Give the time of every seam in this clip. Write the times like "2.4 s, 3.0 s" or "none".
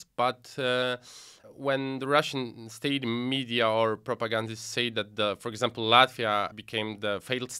1.4 s

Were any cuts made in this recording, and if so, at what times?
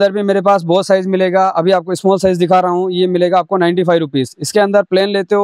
none

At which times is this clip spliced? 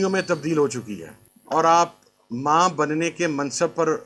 1.3 s

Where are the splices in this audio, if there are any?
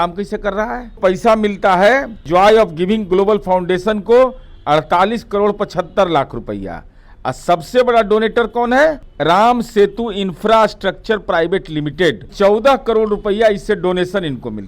1.0 s, 2.2 s, 9.1 s, 12.3 s

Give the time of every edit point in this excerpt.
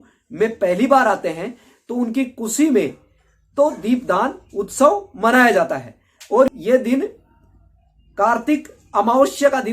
6.5 s

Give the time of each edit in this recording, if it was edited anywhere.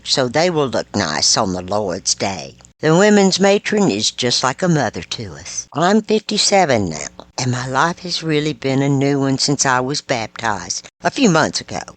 5.6 s

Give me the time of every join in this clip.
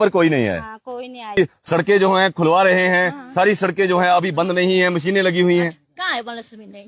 1.4 s

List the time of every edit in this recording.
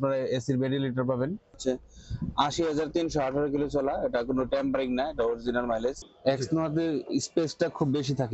1.6 s, 6.1 s

